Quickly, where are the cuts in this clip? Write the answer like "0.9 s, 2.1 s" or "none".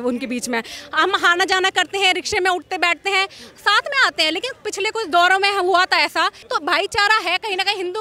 6.4 s